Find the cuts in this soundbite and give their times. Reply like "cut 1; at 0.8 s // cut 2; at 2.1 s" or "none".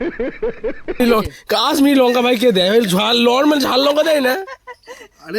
cut 1; at 1.0 s